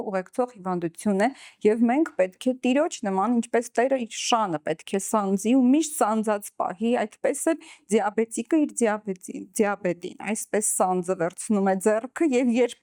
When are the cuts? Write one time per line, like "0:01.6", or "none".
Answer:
none